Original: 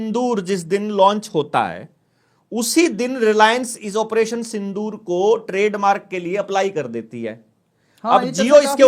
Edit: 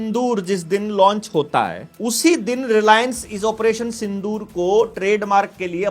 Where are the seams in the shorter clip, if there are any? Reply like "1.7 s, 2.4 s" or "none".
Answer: 1.9 s